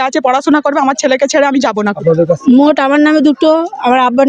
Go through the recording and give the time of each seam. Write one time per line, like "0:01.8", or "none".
0:02.0